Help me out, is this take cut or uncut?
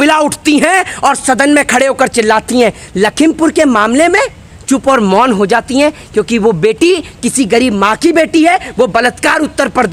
uncut